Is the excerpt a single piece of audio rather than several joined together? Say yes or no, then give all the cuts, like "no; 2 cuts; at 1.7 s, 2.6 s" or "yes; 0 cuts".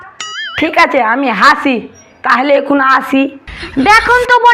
no; 1 cut; at 3.5 s